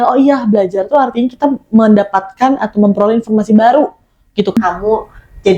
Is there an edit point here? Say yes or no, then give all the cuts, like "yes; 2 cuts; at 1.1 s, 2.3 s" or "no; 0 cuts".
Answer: yes; 1 cut; at 4.6 s